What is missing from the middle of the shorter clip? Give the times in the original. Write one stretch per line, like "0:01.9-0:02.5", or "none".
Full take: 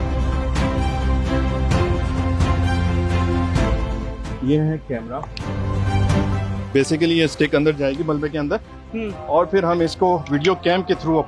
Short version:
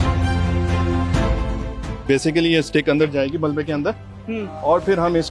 0:04.3-0:06.6